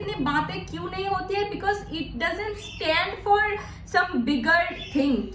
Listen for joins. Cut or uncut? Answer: uncut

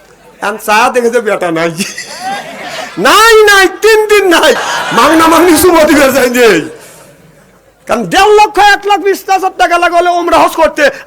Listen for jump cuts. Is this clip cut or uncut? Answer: cut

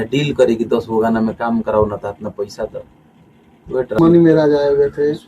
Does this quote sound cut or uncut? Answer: cut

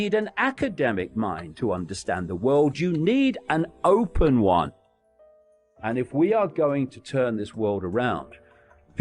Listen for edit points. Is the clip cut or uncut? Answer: cut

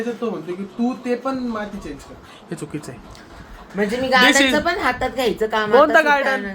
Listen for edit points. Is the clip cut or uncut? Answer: uncut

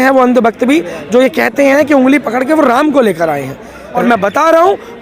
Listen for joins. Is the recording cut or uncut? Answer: cut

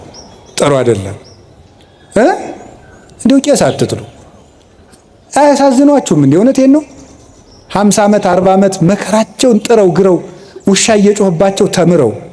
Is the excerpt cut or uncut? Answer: uncut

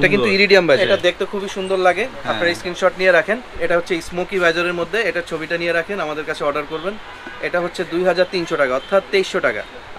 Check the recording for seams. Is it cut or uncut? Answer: cut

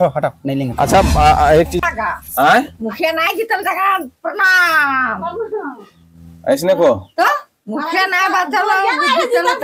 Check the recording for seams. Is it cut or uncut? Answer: cut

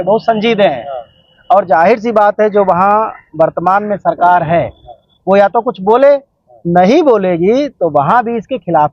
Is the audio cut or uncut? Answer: uncut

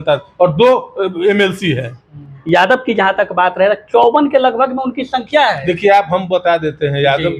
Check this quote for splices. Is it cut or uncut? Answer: cut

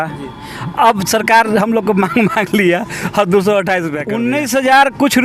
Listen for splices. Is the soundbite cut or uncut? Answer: cut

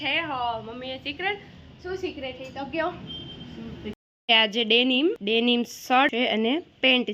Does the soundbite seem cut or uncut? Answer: cut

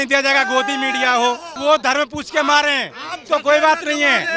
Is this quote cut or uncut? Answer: cut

